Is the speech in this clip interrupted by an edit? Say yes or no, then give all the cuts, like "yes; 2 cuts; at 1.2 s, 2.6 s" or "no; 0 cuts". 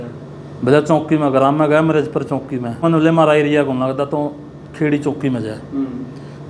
yes; 1 cut; at 2.8 s